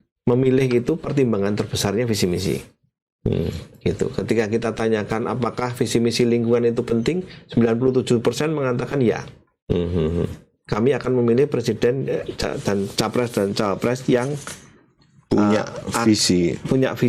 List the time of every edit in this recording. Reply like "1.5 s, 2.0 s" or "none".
none

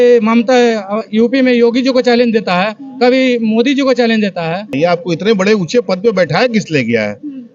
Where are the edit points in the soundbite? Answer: 4.8 s

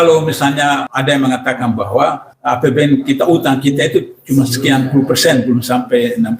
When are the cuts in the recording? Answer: 0.9 s, 2.3 s

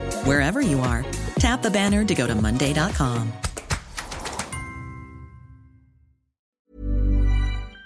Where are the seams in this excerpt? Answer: 6.6 s

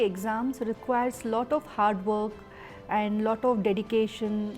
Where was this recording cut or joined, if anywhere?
none

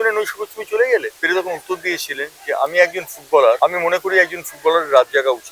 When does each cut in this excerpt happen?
1.1 s, 3.6 s

